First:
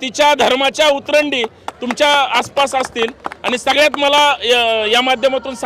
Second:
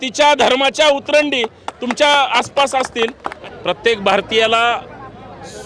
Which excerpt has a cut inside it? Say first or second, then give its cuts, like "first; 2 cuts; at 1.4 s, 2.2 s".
second; 1 cut; at 3.3 s